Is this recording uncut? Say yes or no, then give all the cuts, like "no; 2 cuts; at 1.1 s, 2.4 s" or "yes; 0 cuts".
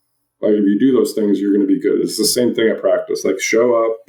yes; 0 cuts